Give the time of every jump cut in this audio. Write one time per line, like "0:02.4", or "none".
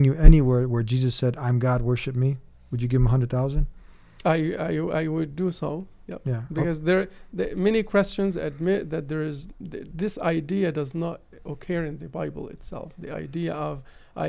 none